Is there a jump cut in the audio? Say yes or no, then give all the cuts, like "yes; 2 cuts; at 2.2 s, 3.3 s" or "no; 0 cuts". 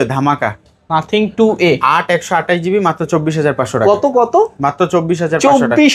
no; 0 cuts